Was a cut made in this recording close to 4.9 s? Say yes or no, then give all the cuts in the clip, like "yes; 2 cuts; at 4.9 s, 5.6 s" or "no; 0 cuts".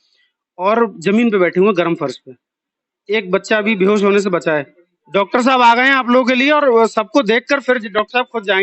yes; 1 cut; at 4.9 s